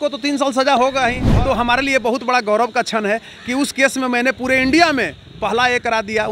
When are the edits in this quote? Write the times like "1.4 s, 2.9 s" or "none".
1.2 s